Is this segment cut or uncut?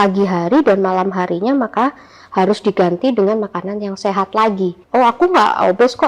cut